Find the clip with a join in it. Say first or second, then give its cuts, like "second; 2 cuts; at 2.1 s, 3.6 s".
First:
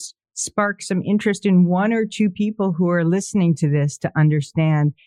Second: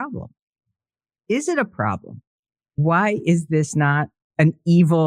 second; 2 cuts; at 2.8 s, 4.2 s